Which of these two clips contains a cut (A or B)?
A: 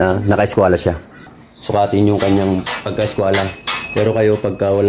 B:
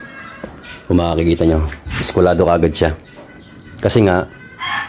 A